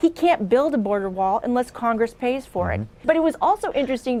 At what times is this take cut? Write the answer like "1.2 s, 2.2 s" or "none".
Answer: none